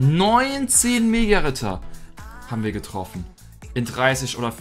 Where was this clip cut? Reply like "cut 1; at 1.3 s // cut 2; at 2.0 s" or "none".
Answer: none